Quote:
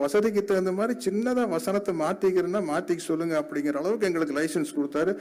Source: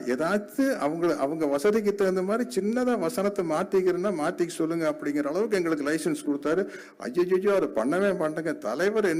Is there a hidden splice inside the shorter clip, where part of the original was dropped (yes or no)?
no